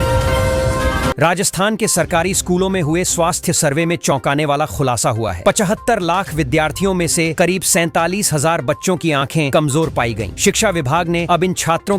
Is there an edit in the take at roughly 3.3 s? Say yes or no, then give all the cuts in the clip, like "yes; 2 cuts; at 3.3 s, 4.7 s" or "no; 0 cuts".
no; 1 cut; at 1.1 s